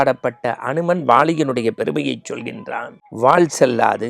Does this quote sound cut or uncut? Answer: cut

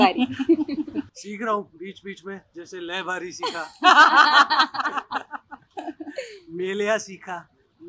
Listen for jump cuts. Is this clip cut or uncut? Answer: cut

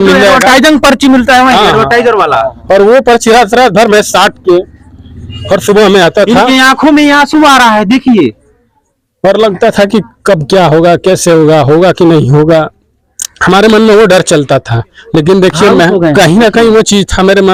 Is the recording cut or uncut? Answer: uncut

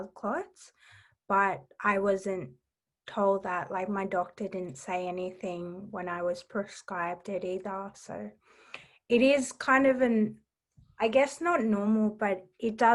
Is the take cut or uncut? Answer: uncut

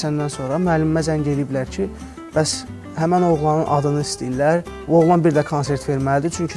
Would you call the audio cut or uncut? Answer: uncut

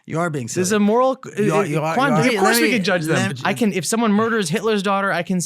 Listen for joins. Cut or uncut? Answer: cut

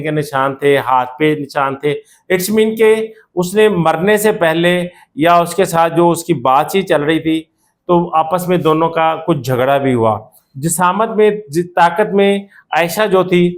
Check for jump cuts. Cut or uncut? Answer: uncut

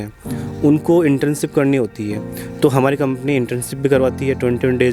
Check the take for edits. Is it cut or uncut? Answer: uncut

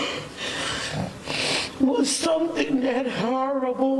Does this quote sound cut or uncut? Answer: cut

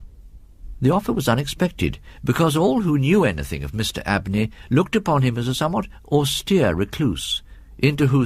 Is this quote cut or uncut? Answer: uncut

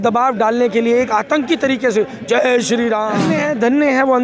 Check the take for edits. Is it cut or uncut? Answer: cut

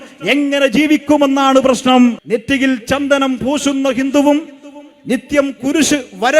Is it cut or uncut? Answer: cut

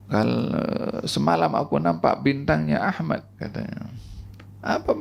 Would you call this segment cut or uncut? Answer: uncut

